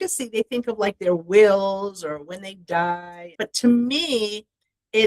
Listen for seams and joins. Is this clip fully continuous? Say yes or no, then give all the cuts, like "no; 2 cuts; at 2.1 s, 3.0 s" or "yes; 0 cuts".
no; 1 cut; at 3.2 s